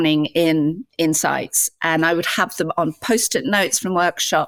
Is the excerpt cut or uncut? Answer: uncut